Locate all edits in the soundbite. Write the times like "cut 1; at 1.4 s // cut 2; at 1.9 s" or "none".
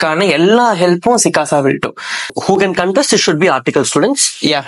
cut 1; at 2.4 s